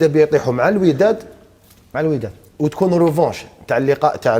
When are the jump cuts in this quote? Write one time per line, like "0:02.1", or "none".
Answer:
none